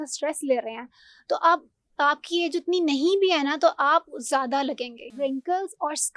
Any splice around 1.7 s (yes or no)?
no